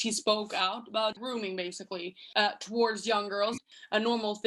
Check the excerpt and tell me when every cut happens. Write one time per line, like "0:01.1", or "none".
0:01.8
0:03.6

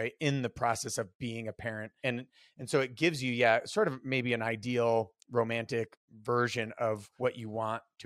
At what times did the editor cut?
0:01.9
0:06.0
0:07.1

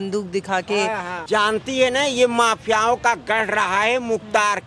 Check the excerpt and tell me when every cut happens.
0:01.2

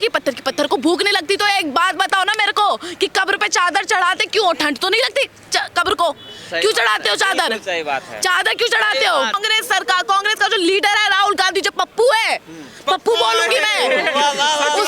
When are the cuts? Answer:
0:09.4

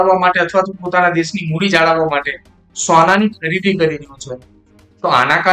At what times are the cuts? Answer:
none

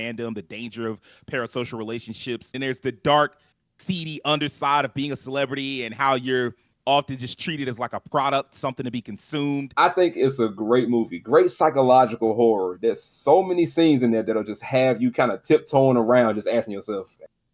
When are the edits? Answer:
0:02.5
0:09.7

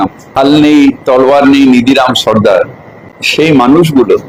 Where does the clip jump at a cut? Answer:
none

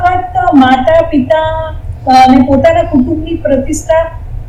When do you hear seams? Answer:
none

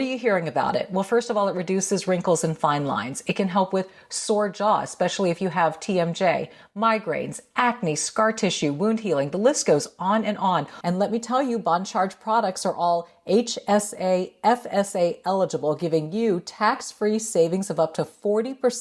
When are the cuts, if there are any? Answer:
0:10.7

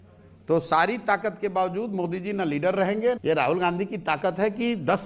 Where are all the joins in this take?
0:03.2

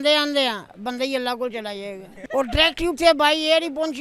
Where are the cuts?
0:02.1

